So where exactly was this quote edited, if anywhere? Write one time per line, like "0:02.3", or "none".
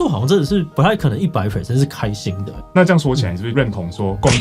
0:02.5
0:03.5